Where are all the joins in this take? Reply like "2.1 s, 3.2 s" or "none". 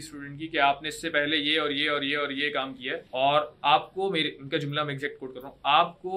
3.0 s